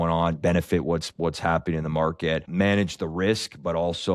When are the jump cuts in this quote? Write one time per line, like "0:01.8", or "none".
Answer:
0:02.5